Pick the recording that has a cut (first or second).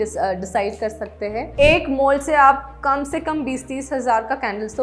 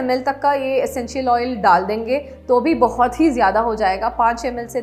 first